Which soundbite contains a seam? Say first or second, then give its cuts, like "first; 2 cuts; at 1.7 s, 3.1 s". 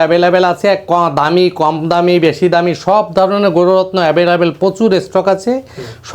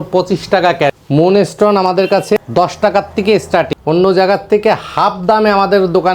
second; 3 cuts; at 0.9 s, 2.4 s, 3.7 s